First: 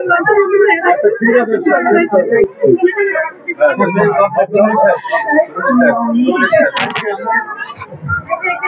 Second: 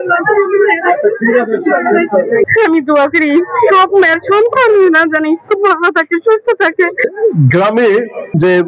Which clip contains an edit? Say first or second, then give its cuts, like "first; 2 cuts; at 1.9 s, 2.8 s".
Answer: second; 2 cuts; at 2.5 s, 7.0 s